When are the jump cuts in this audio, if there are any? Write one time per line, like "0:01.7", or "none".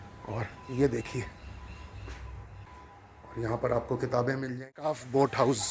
0:02.7
0:04.6